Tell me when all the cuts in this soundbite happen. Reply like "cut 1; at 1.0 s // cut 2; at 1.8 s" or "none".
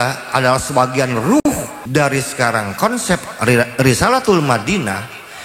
cut 1; at 1.4 s